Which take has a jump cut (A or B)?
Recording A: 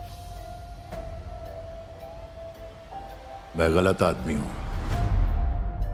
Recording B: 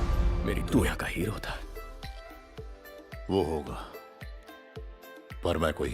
B